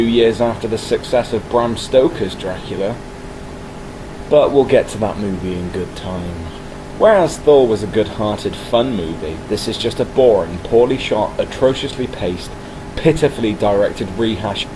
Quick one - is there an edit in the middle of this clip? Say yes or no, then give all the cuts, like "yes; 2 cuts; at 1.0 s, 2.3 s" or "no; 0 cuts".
no; 0 cuts